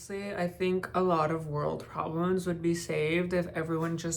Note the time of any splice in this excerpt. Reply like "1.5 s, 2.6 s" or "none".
none